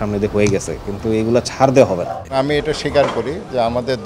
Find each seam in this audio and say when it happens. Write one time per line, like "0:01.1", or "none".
0:02.2